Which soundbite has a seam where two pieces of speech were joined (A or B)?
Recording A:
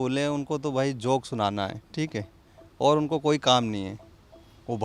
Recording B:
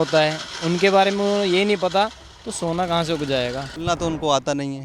B